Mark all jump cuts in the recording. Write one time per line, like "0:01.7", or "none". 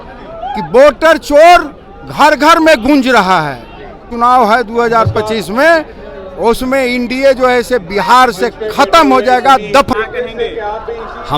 0:04.1
0:09.9

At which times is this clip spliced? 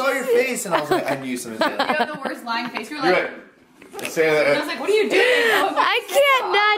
none

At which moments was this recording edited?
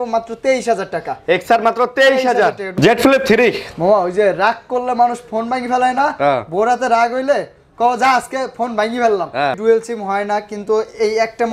0:02.7
0:09.6

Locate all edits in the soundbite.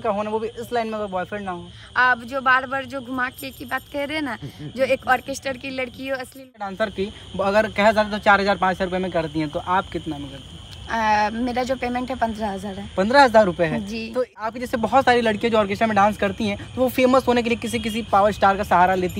0:06.7
0:14.5

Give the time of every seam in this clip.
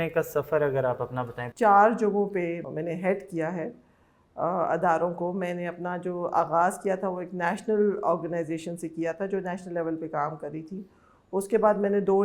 0:01.4
0:02.7

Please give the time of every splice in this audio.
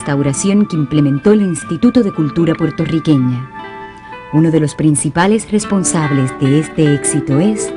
0:01.1

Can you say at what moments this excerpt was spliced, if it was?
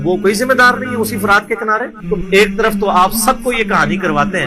0:02.0

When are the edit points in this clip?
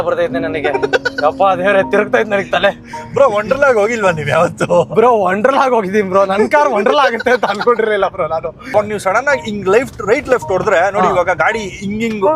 0:08.7

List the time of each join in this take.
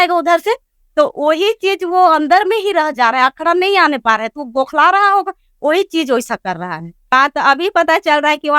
0:07.1

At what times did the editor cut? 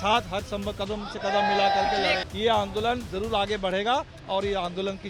0:02.2

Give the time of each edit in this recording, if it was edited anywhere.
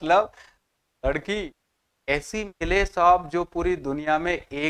none

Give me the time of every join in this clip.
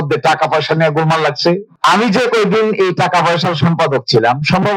0:01.7

